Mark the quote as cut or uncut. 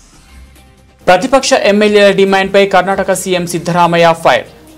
cut